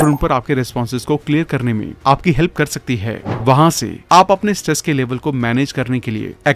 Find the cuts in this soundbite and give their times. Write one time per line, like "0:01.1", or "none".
none